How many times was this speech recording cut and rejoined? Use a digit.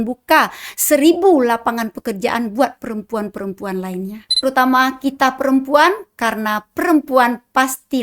1